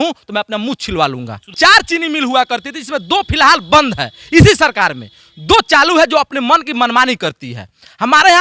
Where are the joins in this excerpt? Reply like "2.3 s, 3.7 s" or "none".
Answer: 1.5 s